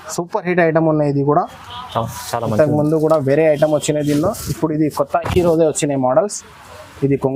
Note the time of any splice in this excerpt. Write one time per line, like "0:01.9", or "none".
none